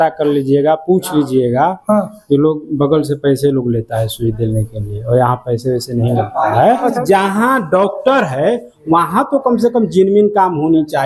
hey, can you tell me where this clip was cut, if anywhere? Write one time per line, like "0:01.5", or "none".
none